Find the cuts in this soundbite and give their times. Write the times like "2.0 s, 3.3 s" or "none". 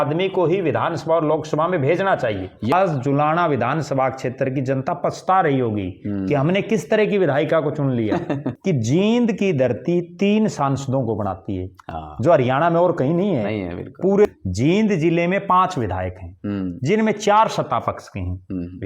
2.7 s, 8.5 s, 14.2 s